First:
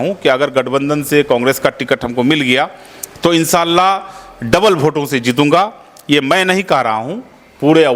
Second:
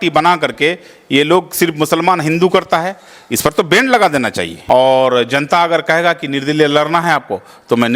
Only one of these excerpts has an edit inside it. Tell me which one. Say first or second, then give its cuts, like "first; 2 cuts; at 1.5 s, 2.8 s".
second; 1 cut; at 4.5 s